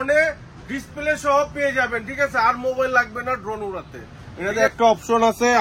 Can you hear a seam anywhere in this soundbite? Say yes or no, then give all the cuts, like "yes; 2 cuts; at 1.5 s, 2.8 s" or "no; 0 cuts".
yes; 1 cut; at 4.2 s